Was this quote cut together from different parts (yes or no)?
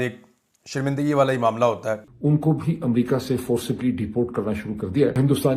no